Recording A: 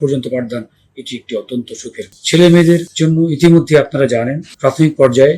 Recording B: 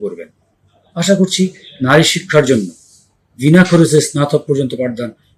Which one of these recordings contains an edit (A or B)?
A